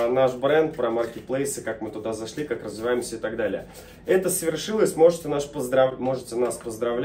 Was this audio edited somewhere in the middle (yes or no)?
no